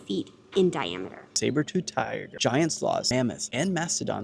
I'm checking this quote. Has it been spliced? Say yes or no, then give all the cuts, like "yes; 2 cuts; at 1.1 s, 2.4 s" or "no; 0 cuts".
yes; 3 cuts; at 1.3 s, 2.3 s, 3.2 s